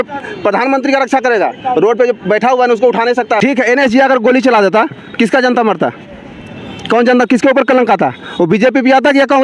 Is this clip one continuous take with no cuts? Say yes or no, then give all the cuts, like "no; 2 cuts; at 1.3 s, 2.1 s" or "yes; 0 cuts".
no; 1 cut; at 3.4 s